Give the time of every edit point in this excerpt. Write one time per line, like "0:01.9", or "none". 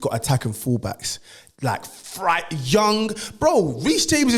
none